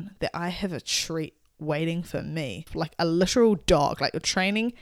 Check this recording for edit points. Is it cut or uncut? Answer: cut